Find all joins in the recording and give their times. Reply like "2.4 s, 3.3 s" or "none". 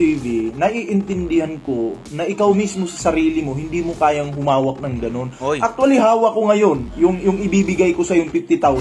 none